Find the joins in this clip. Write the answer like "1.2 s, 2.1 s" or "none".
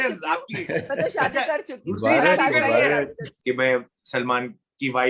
3.2 s